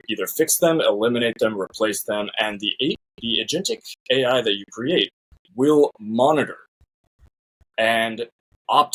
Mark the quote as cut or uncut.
uncut